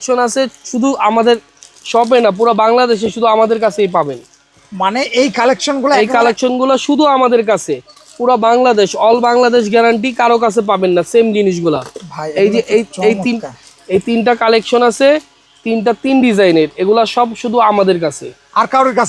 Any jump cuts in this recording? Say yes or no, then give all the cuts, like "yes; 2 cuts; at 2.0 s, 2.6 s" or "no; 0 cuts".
no; 0 cuts